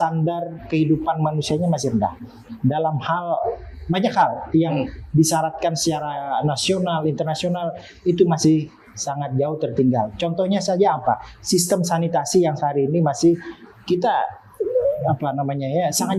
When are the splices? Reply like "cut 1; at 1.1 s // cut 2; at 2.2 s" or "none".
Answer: none